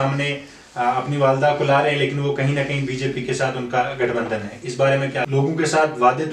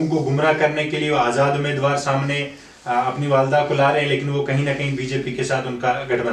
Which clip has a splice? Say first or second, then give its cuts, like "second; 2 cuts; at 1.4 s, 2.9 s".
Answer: first; 1 cut; at 5.2 s